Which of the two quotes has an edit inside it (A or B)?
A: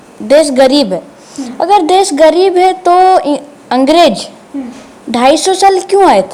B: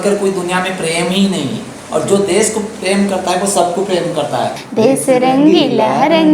B